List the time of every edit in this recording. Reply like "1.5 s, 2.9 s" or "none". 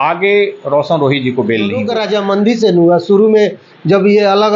1.9 s